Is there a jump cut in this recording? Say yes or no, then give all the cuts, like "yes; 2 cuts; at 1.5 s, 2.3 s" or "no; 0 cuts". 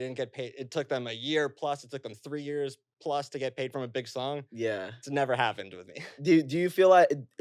no; 0 cuts